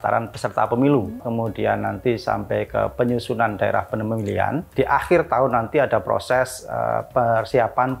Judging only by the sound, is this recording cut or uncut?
cut